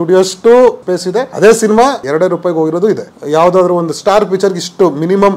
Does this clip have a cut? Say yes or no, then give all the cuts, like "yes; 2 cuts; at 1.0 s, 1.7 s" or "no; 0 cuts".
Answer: yes; 3 cuts; at 0.9 s, 2.0 s, 3.1 s